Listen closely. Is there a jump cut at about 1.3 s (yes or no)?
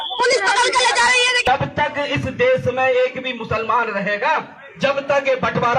yes